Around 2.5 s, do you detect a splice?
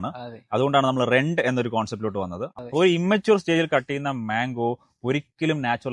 yes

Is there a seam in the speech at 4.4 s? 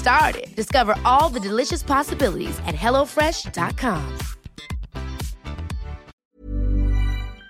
no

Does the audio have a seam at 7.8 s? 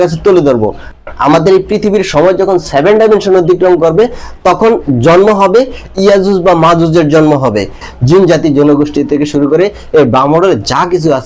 yes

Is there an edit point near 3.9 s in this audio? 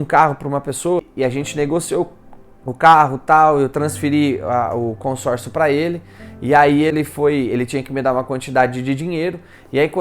no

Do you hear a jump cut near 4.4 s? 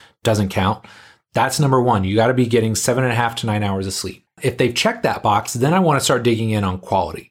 yes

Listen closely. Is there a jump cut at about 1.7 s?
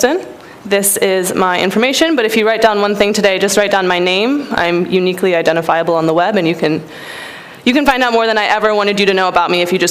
yes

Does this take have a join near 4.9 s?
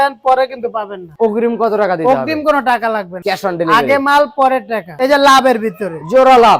yes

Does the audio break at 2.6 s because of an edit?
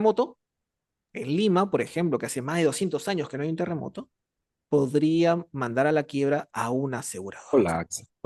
no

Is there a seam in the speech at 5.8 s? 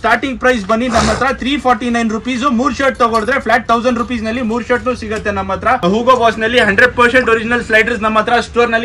yes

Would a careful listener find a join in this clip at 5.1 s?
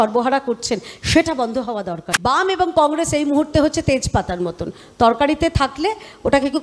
no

